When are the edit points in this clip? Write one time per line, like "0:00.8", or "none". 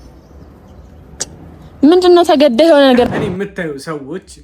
0:03.1

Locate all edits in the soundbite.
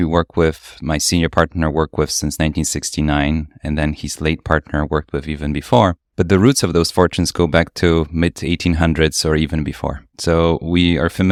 none

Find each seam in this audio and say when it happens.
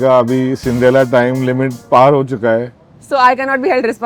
0:01.8

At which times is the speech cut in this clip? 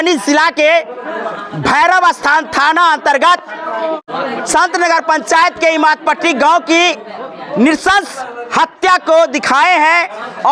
none

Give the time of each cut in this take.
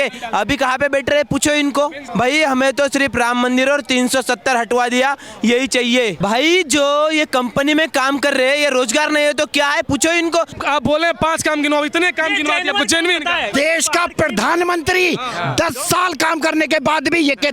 0:02.0
0:06.2
0:10.6
0:13.5

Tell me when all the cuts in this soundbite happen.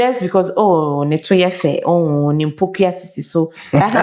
none

